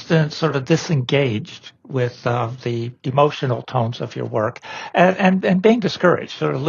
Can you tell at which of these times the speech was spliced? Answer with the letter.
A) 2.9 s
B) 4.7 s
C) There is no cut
A